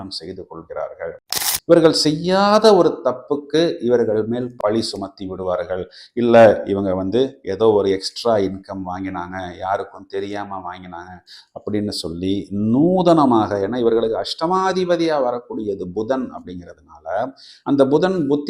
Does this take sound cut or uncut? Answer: cut